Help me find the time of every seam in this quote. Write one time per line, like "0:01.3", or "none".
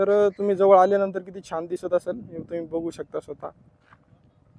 none